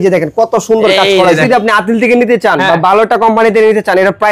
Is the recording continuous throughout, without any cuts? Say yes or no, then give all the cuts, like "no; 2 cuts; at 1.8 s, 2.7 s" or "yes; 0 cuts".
no; 1 cut; at 1.4 s